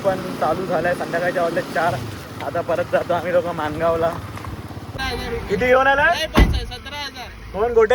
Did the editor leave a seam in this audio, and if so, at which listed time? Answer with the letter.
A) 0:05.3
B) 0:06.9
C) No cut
A